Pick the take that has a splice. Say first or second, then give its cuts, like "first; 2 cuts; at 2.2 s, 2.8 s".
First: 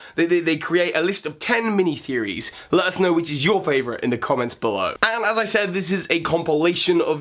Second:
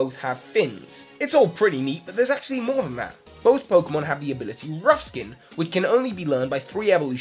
second; 1 cut; at 4.9 s